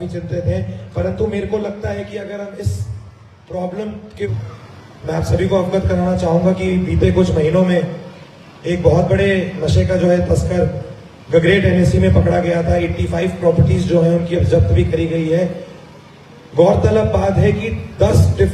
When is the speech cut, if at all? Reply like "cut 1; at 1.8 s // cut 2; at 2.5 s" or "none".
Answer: cut 1; at 4.3 s